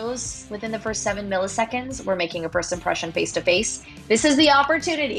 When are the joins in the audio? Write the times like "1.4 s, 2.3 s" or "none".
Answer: none